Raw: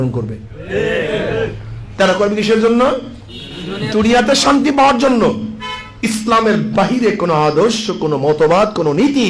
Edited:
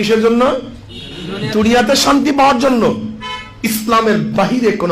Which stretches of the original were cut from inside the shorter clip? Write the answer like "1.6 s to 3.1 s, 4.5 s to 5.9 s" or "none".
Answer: none